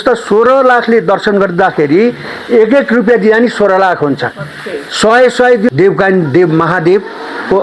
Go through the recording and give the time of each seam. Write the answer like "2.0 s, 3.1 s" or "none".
5.7 s